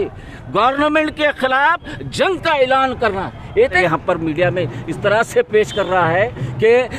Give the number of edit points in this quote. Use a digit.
1